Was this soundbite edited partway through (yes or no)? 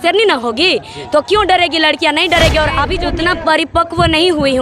yes